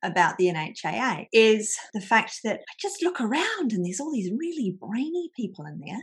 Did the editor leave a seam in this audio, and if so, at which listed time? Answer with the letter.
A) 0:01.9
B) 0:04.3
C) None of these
C